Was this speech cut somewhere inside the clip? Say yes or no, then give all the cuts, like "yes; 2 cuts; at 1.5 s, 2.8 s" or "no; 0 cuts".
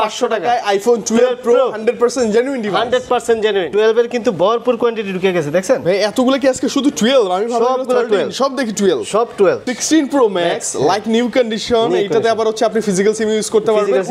yes; 2 cuts; at 3.7 s, 9.7 s